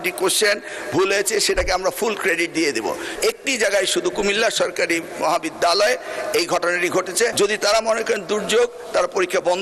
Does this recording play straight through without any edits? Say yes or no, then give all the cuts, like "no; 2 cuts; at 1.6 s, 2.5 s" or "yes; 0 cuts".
no; 2 cuts; at 3.1 s, 7.3 s